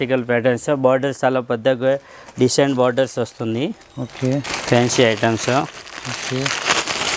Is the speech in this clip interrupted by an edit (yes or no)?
no